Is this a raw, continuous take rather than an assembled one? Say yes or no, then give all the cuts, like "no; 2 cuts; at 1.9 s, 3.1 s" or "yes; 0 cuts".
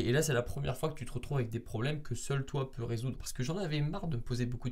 no; 1 cut; at 3.3 s